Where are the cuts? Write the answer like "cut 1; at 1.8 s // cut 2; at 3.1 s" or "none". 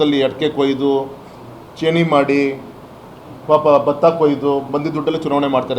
none